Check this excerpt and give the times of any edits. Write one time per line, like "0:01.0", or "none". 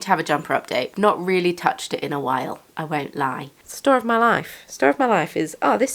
0:00.9
0:03.6